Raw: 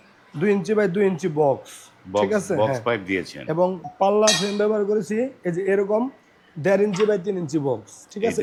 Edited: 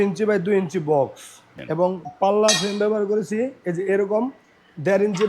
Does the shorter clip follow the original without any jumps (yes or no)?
no